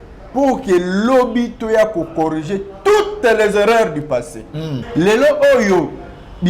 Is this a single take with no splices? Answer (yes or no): no